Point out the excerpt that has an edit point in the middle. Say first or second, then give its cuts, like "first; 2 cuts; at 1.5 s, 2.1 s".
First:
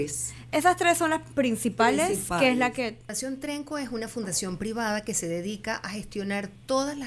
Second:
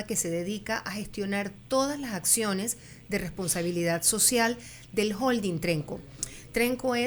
first; 1 cut; at 3.2 s